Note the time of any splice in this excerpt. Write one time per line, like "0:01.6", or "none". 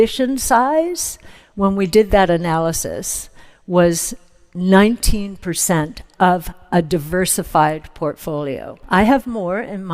0:08.8